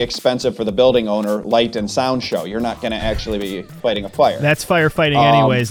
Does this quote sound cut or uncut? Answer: uncut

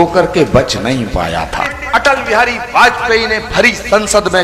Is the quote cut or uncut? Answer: cut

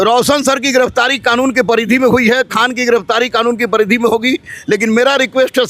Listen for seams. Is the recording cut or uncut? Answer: uncut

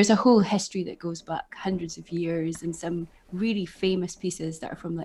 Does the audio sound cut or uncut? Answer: uncut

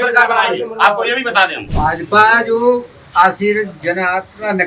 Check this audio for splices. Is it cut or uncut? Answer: cut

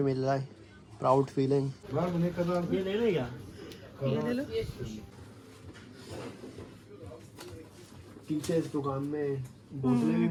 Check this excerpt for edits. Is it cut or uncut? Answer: uncut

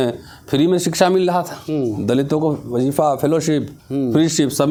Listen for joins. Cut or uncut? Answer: uncut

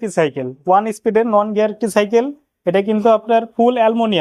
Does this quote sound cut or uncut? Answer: uncut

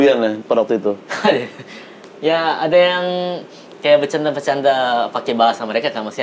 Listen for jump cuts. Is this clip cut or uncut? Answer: uncut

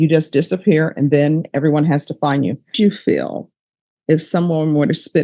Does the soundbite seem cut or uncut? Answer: cut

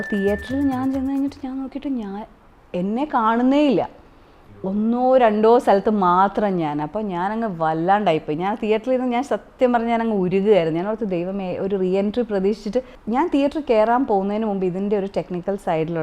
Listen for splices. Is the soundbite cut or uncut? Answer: cut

